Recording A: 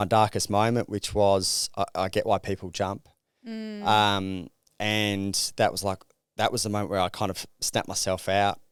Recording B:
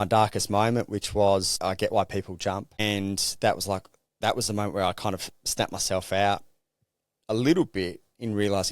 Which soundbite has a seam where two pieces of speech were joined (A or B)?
B